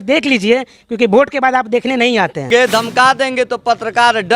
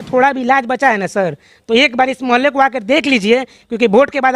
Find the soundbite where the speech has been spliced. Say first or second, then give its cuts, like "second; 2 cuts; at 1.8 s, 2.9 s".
first; 1 cut; at 2.5 s